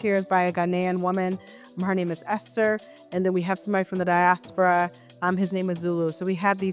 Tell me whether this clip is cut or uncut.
uncut